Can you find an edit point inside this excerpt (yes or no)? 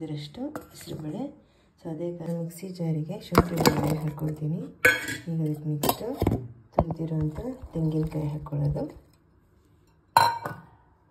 yes